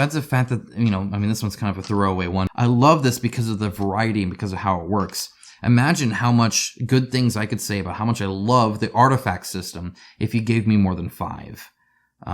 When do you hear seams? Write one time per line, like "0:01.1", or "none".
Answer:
0:02.5